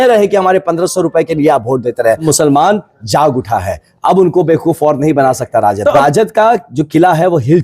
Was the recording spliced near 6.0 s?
yes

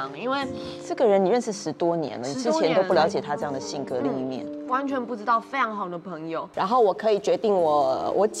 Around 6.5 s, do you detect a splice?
yes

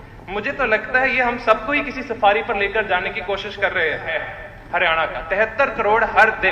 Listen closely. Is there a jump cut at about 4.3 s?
yes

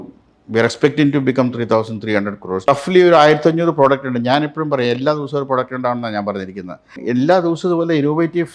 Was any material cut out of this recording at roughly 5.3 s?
no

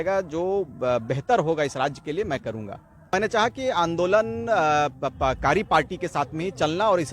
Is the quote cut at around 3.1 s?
yes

